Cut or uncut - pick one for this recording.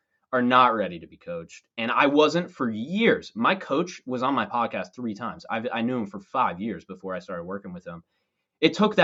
uncut